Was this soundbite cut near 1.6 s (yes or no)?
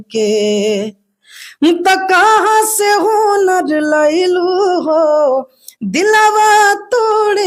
no